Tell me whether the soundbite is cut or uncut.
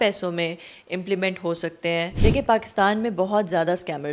cut